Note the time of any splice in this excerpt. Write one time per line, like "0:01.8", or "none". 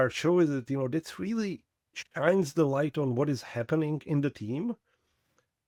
none

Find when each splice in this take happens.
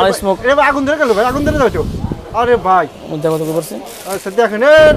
none

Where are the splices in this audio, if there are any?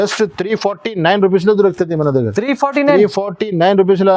none

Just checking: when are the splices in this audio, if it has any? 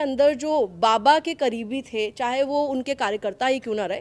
none

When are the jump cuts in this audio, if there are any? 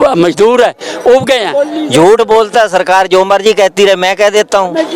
0:01.6

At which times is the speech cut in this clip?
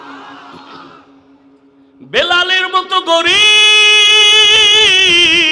0:01.9

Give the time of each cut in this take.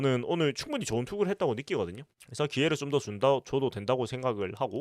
none

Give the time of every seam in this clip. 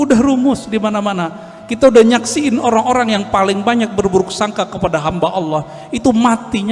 none

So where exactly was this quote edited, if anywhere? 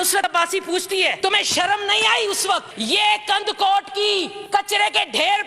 0:01.1
0:02.7
0:04.4

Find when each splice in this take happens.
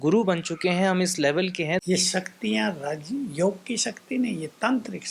0:01.8

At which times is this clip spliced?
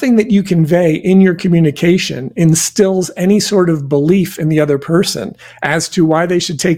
none

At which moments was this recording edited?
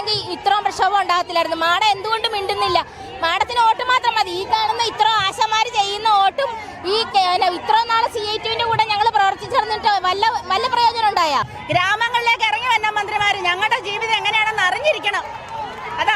0:11.6

